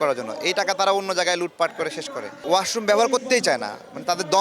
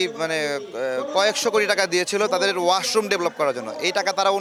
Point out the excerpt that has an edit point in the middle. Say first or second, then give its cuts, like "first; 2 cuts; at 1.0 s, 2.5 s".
first; 1 cut; at 2.4 s